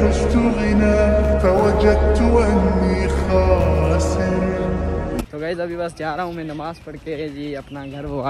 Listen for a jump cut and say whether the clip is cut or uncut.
uncut